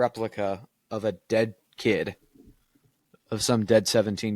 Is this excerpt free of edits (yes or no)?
yes